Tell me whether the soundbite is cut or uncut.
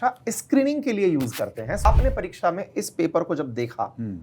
cut